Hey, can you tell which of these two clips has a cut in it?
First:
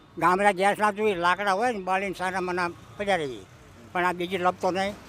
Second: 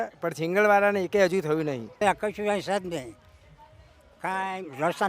second; 1 cut; at 2.0 s

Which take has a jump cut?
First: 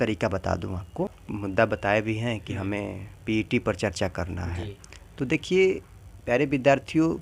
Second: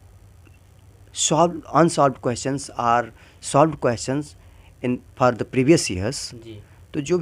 first; 1 cut; at 1.3 s

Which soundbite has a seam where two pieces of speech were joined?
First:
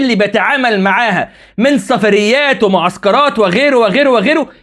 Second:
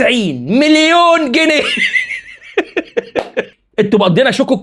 second; 1 cut; at 3.5 s

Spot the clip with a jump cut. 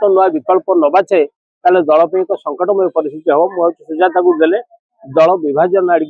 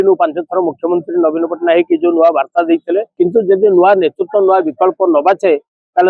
second; 1 cut; at 3.1 s

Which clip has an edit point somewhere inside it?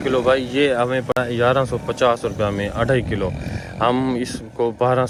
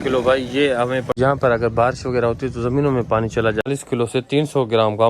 second; 2 cuts; at 1.1 s, 3.7 s

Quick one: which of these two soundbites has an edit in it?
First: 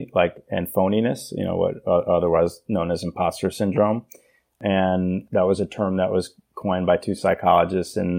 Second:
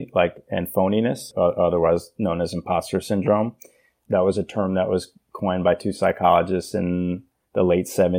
second; 2 cuts; at 1.3 s, 4.0 s

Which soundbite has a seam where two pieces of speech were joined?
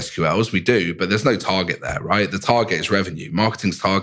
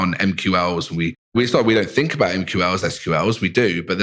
second; 1 cut; at 1.3 s

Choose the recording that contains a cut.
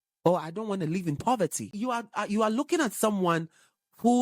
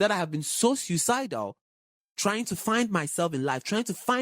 first; 1 cut; at 1.7 s

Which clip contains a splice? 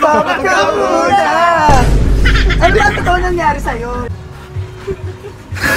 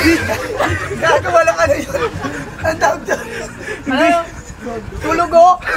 first; 1 cut; at 4.1 s

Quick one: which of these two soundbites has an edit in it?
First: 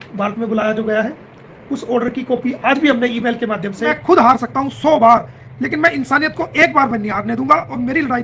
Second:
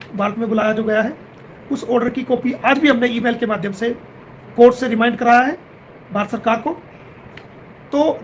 first; 1 cut; at 4.0 s

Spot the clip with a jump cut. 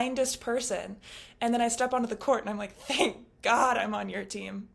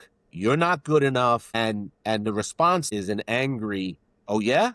second; 2 cuts; at 1.5 s, 2.9 s

